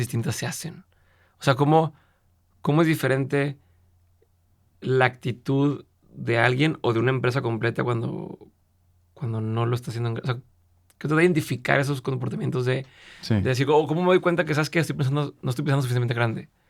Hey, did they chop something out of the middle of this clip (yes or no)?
no